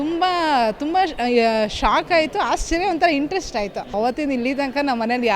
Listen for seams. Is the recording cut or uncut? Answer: cut